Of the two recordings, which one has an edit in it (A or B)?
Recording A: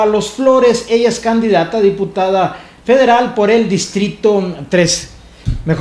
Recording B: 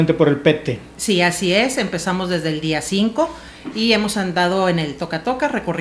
A